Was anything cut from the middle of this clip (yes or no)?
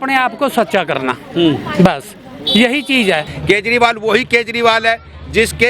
yes